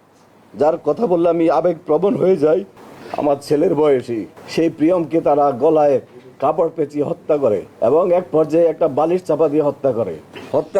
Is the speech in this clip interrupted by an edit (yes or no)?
yes